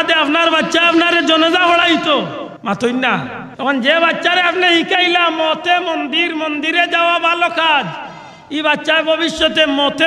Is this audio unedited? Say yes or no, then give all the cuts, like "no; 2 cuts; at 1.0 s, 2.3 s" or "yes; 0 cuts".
no; 2 cuts; at 2.5 s, 3.4 s